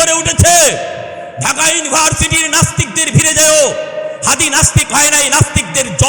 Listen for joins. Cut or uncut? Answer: uncut